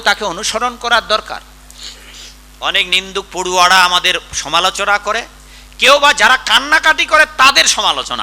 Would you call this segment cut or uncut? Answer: uncut